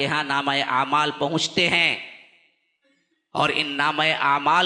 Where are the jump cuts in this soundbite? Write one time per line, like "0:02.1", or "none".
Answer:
none